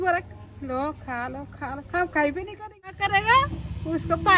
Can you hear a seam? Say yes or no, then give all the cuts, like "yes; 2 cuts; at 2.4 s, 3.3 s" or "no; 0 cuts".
yes; 1 cut; at 3.0 s